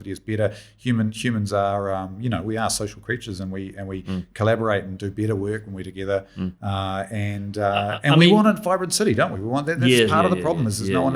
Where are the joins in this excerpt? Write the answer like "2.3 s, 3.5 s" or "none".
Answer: none